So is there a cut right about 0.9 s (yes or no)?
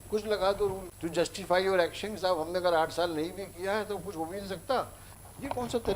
yes